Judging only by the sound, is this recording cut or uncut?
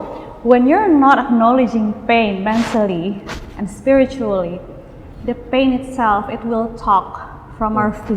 uncut